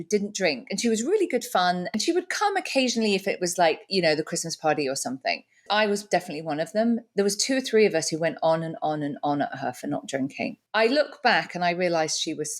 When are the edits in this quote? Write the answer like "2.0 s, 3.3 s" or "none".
1.9 s, 5.6 s, 10.6 s